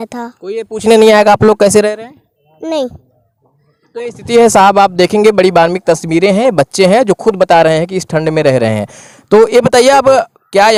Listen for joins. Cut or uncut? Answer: uncut